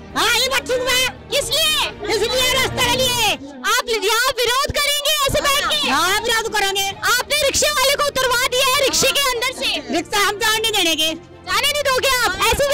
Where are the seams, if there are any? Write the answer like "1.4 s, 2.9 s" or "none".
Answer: none